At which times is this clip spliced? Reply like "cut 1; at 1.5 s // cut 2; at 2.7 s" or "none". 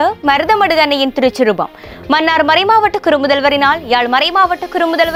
none